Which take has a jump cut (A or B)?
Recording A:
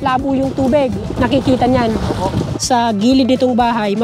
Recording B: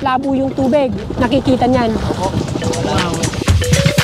A